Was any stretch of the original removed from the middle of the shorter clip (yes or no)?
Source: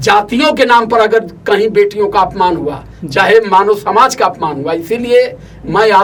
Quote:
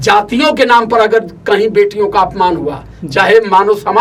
no